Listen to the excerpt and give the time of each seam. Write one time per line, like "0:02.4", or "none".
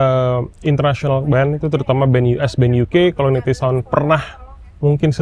none